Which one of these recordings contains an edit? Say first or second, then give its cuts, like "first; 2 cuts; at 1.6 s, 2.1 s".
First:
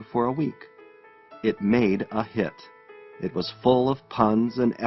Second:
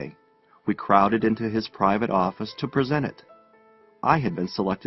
second; 1 cut; at 2.7 s